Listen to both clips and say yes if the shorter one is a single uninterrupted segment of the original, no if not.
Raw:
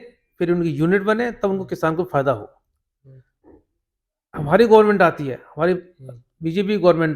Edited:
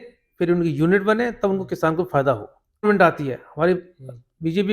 no